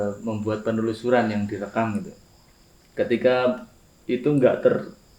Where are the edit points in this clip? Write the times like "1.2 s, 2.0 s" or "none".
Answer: none